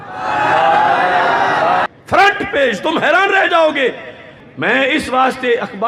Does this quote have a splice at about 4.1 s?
no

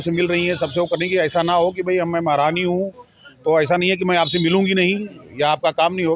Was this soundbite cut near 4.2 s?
no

